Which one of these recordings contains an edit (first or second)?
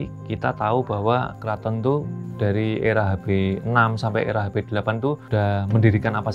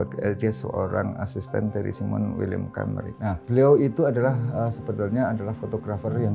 first